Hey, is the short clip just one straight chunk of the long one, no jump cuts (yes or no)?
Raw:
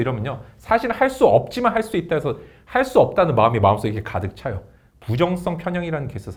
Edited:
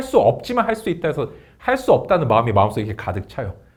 yes